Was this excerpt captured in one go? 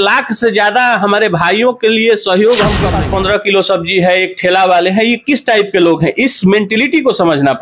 no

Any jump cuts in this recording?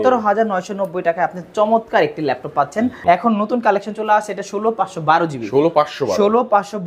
yes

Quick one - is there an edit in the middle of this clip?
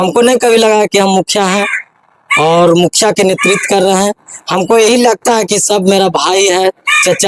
no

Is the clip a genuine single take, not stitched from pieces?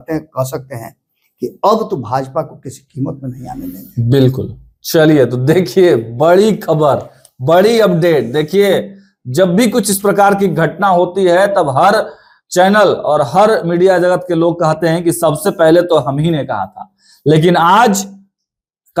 yes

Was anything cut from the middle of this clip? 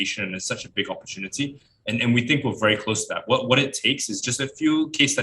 yes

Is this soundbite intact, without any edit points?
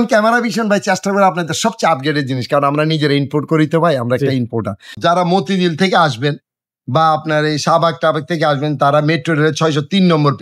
no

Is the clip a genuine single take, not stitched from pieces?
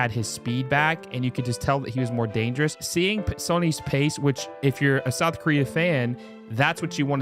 no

